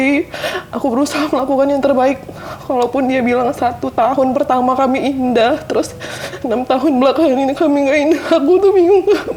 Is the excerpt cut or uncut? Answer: uncut